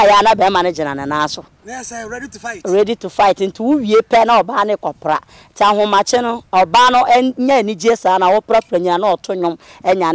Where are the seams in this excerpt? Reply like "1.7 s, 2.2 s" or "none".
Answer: none